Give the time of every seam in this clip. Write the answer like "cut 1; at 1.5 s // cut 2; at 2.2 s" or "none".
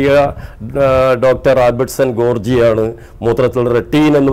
none